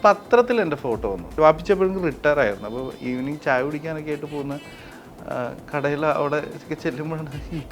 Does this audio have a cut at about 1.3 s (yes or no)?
yes